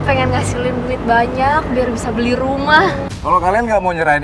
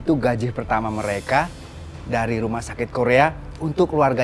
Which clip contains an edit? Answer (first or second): first